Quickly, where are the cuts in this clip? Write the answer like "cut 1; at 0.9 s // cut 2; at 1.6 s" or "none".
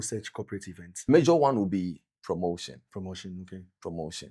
cut 1; at 1.1 s